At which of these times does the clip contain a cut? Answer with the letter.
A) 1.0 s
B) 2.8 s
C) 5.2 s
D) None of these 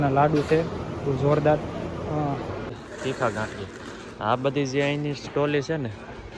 B